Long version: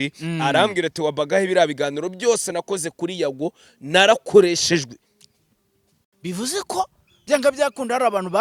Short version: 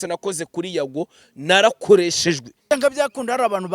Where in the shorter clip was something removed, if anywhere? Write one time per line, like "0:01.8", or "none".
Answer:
0:02.5